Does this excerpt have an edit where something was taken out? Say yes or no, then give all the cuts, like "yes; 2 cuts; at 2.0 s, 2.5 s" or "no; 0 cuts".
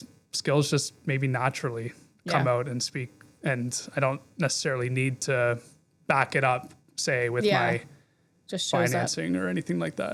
no; 0 cuts